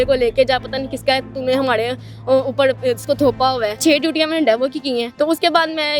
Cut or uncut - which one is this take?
cut